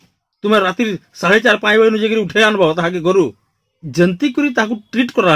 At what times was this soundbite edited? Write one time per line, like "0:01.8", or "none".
0:03.9